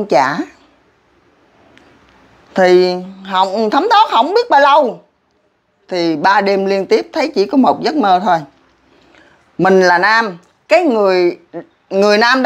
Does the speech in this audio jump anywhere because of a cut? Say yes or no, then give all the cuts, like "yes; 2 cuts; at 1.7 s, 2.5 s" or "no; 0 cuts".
no; 0 cuts